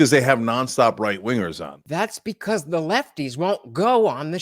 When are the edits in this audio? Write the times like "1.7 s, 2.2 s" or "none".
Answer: 1.9 s